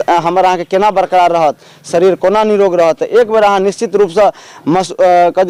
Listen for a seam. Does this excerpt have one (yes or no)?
no